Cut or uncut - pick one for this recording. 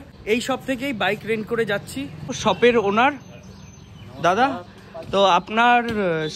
uncut